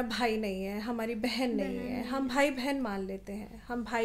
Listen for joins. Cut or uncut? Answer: uncut